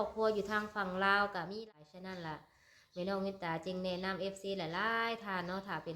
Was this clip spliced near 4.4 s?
no; 1 cut; at 1.5 s

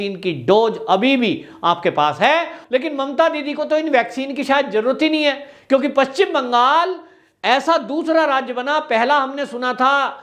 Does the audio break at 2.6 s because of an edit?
yes; 1 cut; at 2.6 s

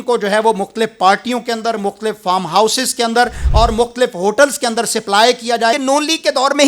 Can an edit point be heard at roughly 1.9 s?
no; 1 cut; at 5.7 s

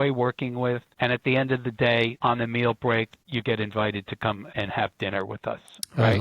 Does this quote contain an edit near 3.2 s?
yes; 4 cuts; at 0.9 s, 2.1 s, 3.2 s, 4.4 s

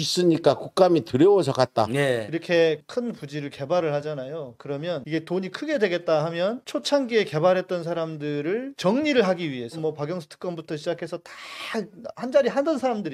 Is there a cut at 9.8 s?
yes; 3 cuts; at 2.3 s, 8.7 s, 9.8 s

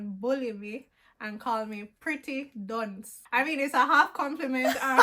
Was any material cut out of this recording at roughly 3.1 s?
yes; 1 cut; at 3.1 s

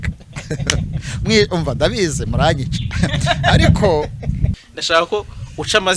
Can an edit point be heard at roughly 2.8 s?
no; 1 cut; at 4.5 s

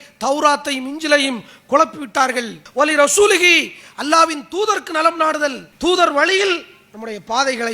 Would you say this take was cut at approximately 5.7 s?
yes; 2 cuts; at 2.6 s, 5.7 s

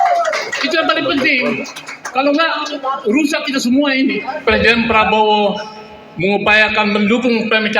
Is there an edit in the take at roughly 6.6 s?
no; 1 cut; at 4.3 s

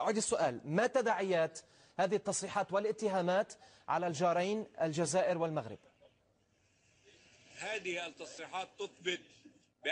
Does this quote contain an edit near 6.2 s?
yes; 1 cut; at 6.2 s

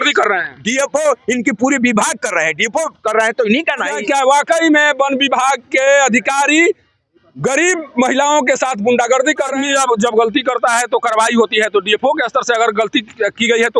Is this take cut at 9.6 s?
yes; 2 cuts; at 3.9 s, 9.6 s

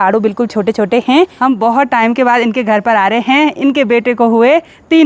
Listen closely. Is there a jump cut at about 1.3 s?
yes; 1 cut; at 1.3 s

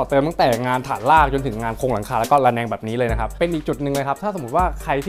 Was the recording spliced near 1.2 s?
no; 1 cut; at 3.3 s

